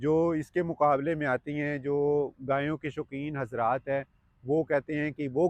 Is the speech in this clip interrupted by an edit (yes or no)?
no